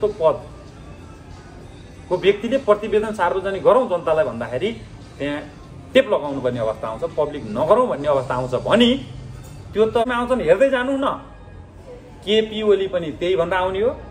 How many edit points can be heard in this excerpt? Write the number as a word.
one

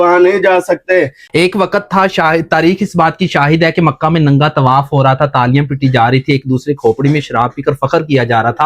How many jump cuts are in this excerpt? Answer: one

